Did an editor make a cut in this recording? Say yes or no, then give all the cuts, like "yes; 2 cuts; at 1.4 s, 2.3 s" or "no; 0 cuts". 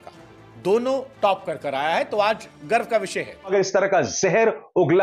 yes; 1 cut; at 3.5 s